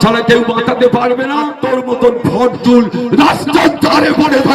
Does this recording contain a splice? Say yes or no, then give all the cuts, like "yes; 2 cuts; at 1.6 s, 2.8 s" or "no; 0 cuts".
yes; 1 cut; at 1.4 s